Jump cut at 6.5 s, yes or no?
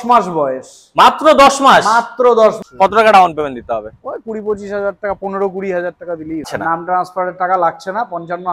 yes